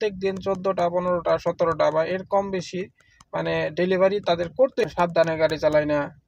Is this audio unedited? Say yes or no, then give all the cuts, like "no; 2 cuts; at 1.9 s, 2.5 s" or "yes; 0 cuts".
no; 1 cut; at 4.8 s